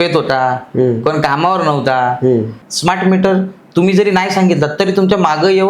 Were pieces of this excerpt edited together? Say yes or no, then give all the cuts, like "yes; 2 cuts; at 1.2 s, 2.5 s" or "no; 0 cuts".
yes; 1 cut; at 2.6 s